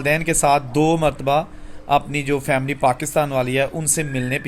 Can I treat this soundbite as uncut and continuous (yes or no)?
yes